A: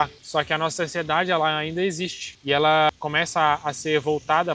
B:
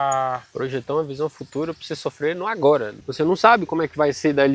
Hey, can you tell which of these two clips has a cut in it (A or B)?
B